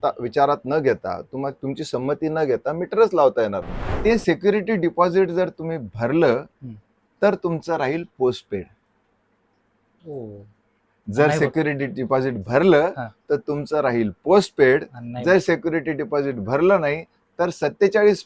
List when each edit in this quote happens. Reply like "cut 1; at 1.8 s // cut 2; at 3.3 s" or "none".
cut 1; at 3.9 s